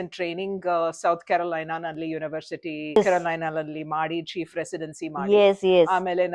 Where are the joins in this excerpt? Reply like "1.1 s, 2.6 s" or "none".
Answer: none

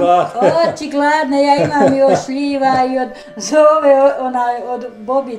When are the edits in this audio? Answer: none

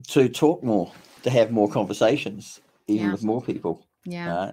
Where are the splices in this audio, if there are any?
1.1 s

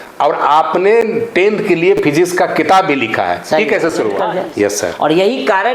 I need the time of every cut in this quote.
4.7 s

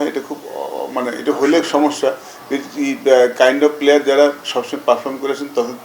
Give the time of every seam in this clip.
none

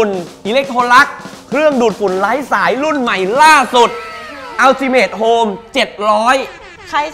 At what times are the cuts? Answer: none

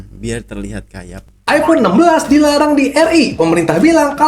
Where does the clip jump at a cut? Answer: 1.4 s

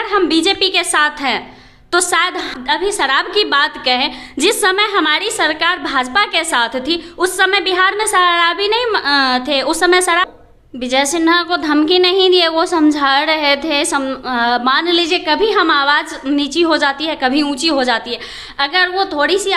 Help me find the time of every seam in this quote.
2.5 s, 10.3 s

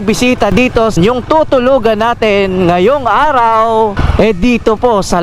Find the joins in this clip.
1.0 s, 4.0 s

